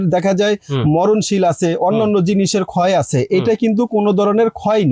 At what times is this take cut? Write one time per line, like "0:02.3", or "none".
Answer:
none

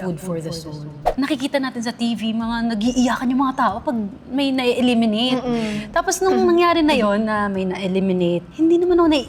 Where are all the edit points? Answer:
0:01.0

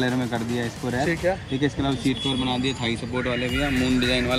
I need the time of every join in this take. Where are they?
none

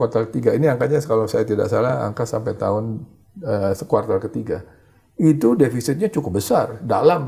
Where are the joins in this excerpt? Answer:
none

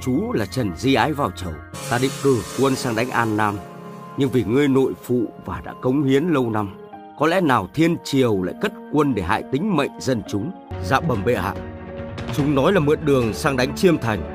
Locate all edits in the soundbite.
0:10.7

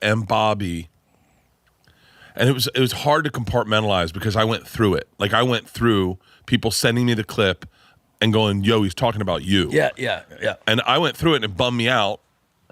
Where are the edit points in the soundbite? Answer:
none

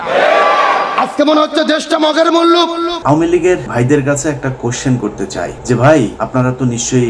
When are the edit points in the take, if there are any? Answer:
0:02.9
0:03.7
0:05.6
0:06.2

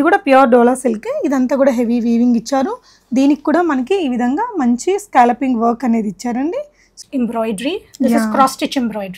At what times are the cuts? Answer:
0:07.0

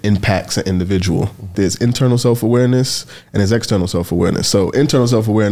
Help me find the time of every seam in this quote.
0:01.5

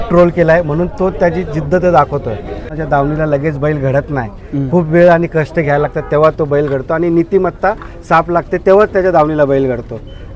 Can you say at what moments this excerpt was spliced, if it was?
0:02.7

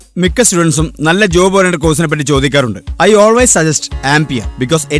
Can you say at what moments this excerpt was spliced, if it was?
none

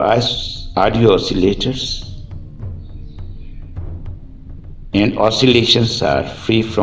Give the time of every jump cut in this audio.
0:01.9
0:04.9

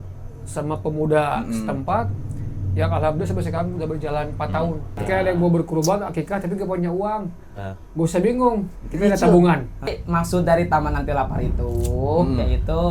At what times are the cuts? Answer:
0:05.0
0:10.0

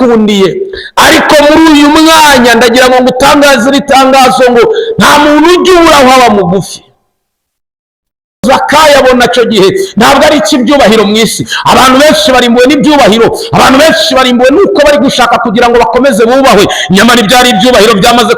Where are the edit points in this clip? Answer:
0:08.4

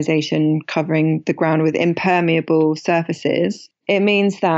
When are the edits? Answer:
0:03.7

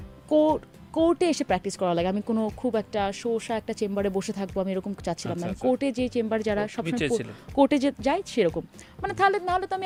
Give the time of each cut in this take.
none

